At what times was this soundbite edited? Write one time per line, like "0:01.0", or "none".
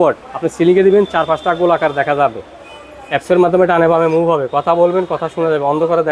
none